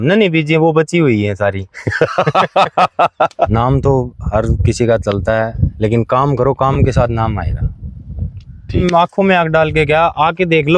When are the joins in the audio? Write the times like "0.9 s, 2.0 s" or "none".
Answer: 3.5 s, 8.8 s